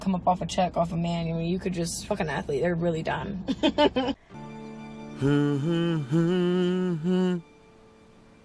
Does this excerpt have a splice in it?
yes; 1 cut; at 4.3 s

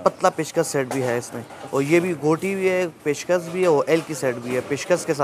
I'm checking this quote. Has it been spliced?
no; 0 cuts

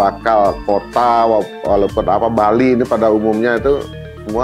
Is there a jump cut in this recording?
no; 0 cuts

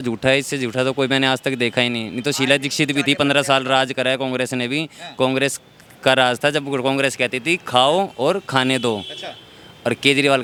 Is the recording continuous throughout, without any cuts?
yes; 0 cuts

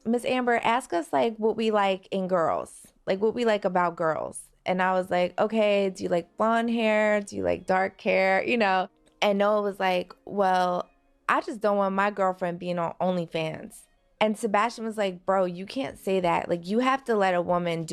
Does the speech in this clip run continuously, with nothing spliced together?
yes; 0 cuts

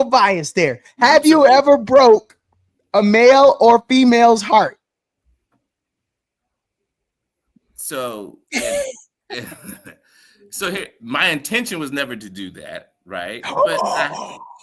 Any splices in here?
no; 0 cuts

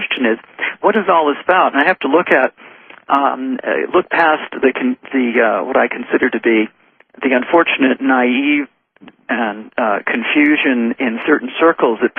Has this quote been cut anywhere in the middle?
no; 0 cuts

